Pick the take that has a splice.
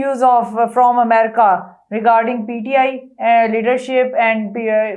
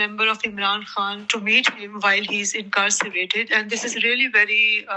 second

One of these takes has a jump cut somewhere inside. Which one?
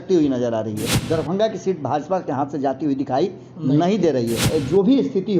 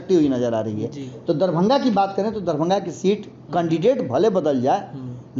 first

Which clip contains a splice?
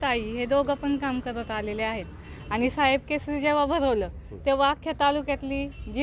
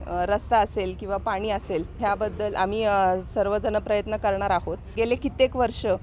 second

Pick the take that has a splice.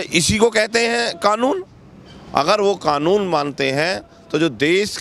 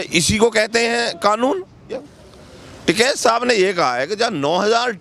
second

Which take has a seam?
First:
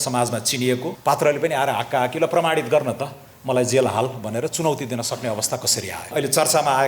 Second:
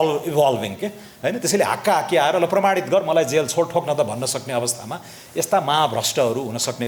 first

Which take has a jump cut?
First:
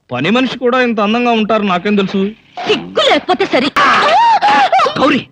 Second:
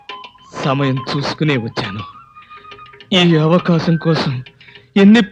first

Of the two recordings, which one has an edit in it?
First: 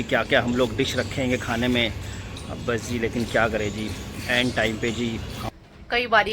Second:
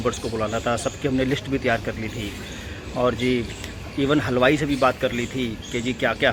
first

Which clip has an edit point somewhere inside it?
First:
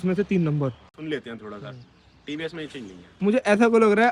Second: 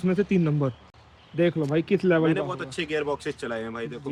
first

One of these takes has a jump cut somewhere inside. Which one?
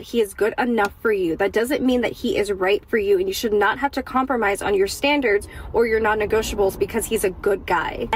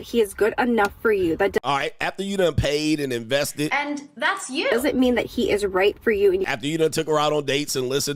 first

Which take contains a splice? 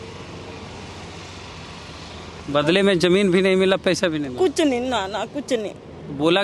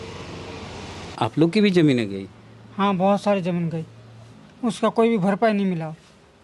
second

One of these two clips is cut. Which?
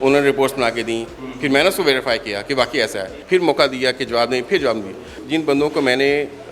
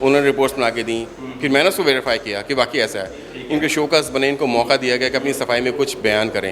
first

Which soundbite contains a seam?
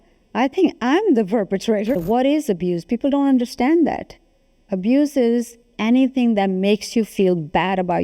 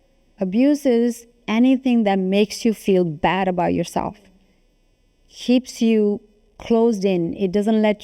first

